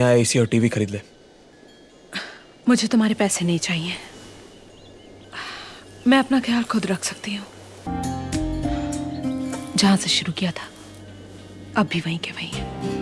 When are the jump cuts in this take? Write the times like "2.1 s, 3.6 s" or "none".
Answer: 7.9 s